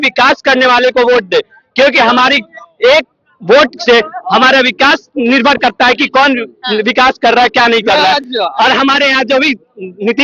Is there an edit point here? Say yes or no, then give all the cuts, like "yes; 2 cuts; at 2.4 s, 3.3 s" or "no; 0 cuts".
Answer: no; 0 cuts